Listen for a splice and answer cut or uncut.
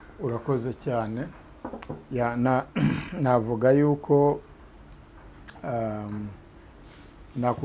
uncut